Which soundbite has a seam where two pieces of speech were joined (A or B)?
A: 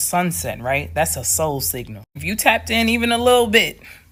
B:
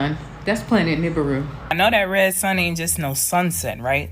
B